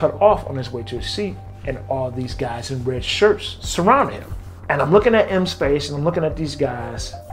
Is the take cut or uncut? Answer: uncut